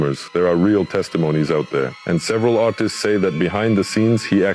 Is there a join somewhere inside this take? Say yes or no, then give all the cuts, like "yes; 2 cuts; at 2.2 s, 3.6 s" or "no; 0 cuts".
yes; 1 cut; at 1.9 s